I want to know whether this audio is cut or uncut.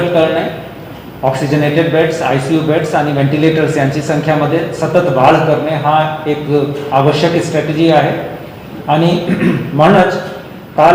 uncut